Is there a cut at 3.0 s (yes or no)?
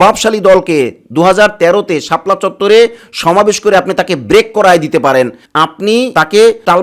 no